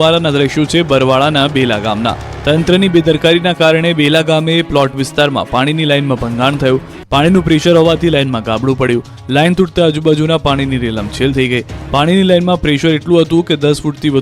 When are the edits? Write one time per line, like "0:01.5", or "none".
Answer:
0:12.0